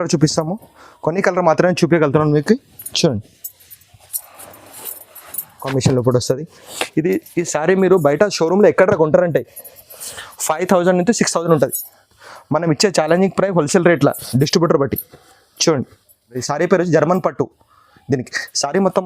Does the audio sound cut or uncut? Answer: cut